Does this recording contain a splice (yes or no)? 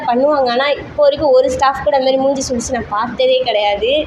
no